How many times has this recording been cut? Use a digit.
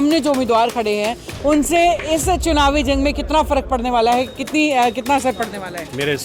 0